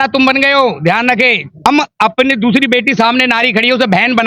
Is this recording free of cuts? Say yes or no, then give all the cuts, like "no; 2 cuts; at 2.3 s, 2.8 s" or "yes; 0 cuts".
no; 1 cut; at 1.6 s